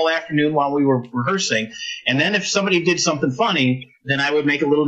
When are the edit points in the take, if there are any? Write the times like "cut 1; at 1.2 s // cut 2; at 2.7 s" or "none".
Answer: none